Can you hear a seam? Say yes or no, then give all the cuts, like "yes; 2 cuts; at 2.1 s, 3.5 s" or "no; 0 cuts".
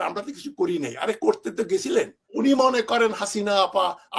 yes; 1 cut; at 2.3 s